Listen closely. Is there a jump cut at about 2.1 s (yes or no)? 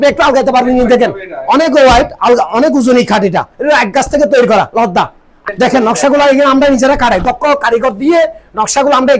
no